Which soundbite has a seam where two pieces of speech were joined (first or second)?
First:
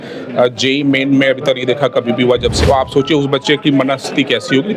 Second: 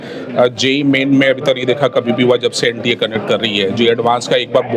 first